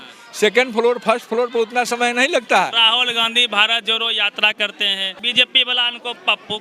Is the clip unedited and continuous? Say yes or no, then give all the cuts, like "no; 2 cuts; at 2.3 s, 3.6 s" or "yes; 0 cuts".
no; 2 cuts; at 2.8 s, 5.2 s